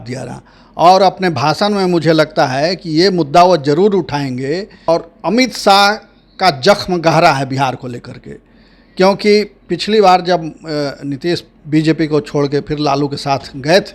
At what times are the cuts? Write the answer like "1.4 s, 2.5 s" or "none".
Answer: 4.7 s